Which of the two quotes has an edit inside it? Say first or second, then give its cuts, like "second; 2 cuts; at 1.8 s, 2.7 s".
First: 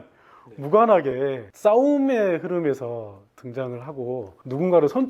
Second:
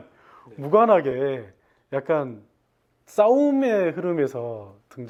first; 1 cut; at 1.5 s